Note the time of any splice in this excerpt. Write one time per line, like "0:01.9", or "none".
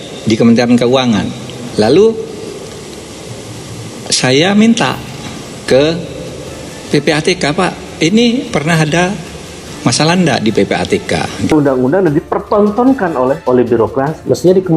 0:02.2
0:11.5

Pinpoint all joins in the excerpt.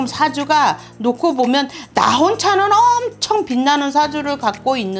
none

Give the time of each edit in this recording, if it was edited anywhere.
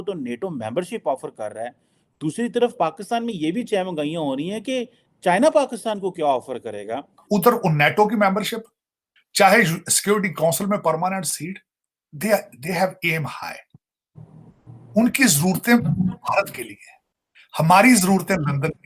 0:07.2

